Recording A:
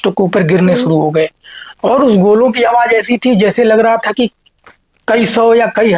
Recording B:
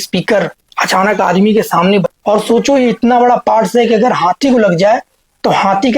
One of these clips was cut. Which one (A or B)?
B